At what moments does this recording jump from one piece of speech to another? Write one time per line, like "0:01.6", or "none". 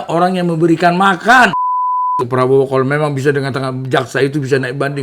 0:02.2